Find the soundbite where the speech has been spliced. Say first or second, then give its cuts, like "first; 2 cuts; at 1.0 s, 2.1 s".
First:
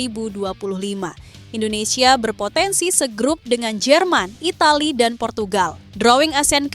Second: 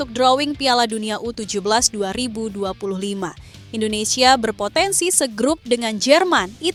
first; 1 cut; at 5.8 s